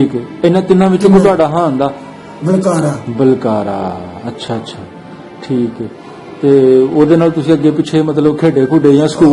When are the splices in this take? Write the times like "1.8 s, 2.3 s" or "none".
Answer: none